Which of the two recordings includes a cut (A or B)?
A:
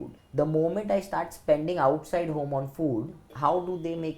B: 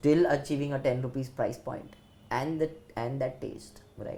A